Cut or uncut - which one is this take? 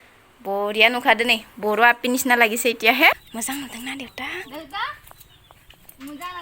cut